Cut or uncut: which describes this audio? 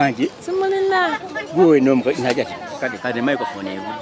uncut